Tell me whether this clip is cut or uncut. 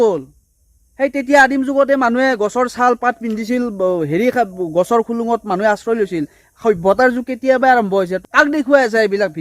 cut